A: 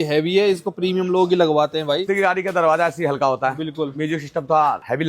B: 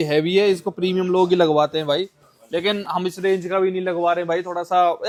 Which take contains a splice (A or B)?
A